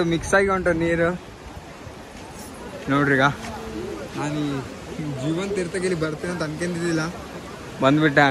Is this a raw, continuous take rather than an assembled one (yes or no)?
yes